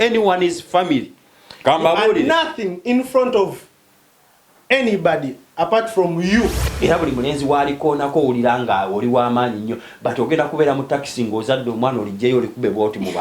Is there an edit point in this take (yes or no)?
yes